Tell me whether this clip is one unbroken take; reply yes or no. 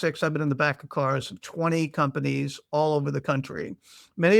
yes